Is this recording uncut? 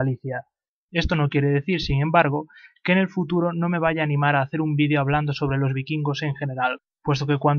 no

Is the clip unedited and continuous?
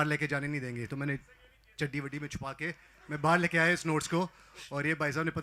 yes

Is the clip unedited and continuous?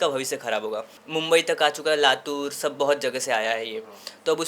no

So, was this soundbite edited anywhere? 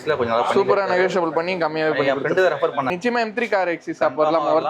yes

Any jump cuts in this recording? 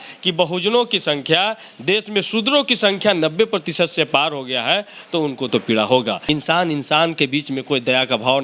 yes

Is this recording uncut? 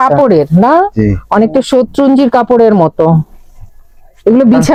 yes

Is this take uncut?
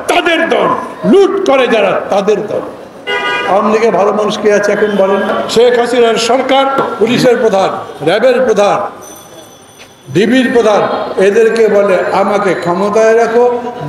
no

